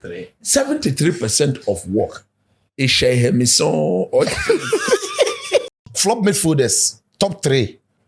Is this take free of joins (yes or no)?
no